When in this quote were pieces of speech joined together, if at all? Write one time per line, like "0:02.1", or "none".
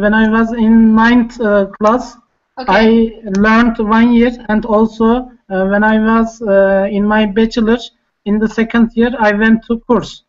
0:06.4